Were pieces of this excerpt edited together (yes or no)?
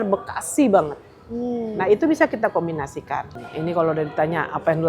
yes